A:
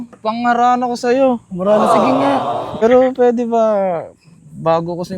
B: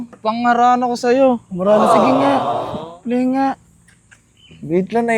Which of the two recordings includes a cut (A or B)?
A